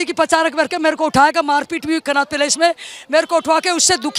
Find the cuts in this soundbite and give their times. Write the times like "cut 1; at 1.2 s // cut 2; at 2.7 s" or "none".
none

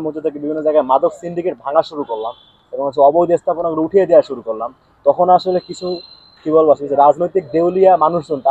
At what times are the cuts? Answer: none

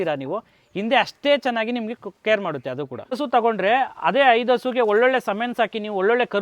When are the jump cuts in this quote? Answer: cut 1; at 3.2 s

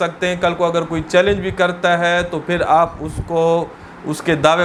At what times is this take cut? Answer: none

